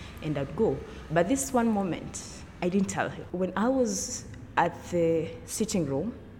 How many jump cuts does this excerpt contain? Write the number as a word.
one